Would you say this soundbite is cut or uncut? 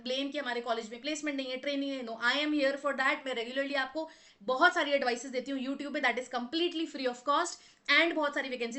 uncut